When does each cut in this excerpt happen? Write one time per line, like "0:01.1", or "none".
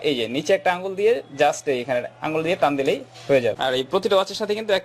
0:03.6